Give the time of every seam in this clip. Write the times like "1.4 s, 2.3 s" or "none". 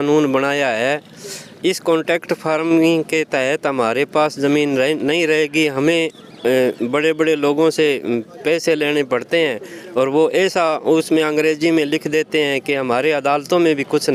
none